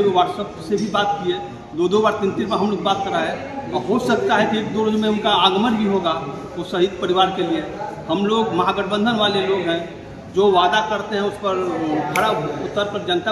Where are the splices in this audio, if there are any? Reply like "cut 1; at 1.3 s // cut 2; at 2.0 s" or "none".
none